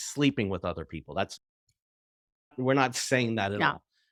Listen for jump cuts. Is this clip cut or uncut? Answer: uncut